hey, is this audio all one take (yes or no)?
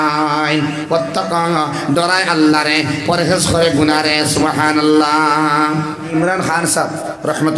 no